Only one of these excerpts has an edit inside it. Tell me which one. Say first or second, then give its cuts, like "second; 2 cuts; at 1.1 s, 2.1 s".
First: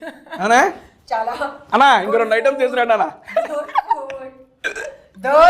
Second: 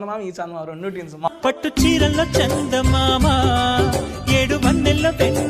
second; 1 cut; at 1.3 s